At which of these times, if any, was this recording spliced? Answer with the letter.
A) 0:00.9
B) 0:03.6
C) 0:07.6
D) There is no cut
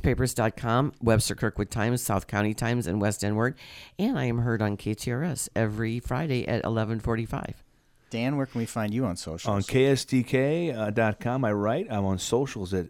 D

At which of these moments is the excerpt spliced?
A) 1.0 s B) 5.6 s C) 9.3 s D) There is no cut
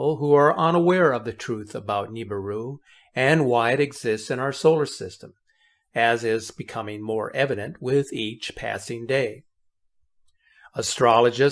C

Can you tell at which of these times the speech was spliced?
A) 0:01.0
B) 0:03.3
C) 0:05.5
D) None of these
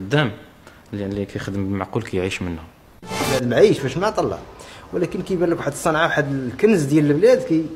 B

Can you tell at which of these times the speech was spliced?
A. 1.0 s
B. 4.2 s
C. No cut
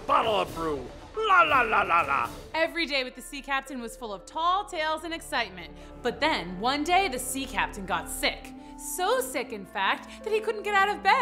C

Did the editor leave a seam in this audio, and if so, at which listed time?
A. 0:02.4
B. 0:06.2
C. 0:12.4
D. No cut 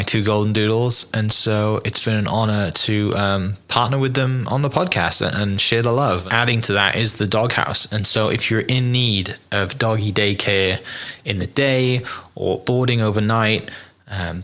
B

